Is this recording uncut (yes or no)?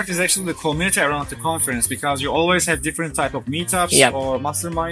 yes